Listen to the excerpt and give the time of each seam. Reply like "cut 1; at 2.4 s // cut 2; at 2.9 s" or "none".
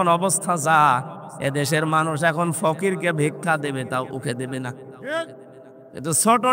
none